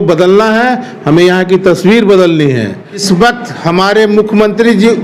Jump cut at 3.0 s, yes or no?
yes